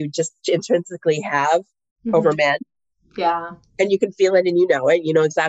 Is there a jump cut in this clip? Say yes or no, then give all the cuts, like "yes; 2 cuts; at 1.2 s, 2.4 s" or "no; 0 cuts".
no; 0 cuts